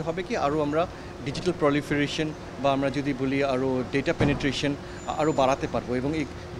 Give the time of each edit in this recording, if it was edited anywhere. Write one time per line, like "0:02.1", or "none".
none

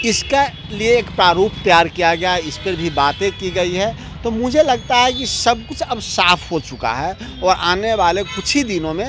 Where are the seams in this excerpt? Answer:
none

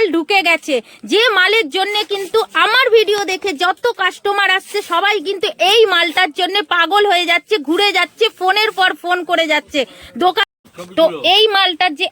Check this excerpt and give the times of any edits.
0:10.4

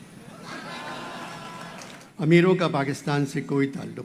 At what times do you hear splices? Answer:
0:02.0

